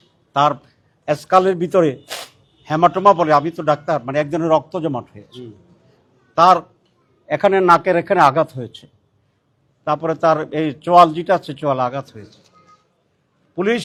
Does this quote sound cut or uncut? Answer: uncut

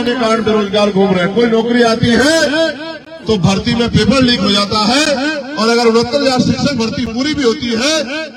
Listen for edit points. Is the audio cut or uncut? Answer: uncut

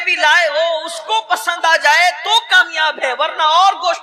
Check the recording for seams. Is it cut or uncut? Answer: uncut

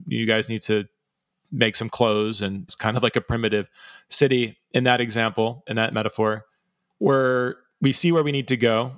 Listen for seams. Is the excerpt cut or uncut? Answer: cut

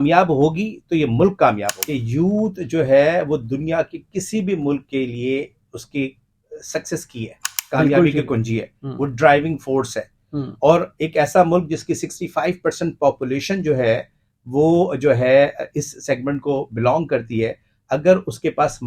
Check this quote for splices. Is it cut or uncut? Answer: cut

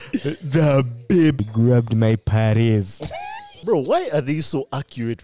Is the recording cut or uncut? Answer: cut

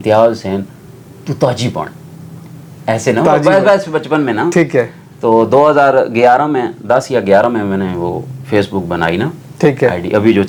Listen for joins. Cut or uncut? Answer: uncut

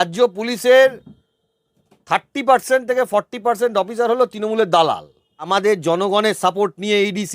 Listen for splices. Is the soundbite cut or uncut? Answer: cut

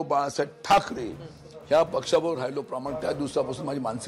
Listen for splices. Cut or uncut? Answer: uncut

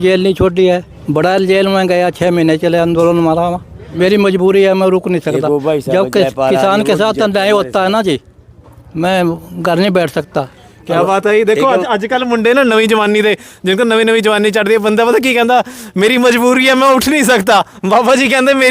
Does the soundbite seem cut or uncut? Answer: cut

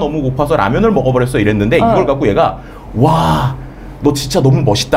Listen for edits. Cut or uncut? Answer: uncut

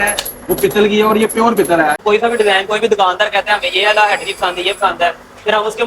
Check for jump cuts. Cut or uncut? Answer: cut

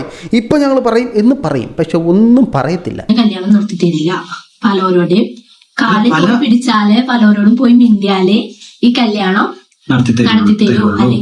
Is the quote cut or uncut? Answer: cut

